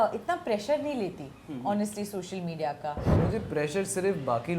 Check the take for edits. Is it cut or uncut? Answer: cut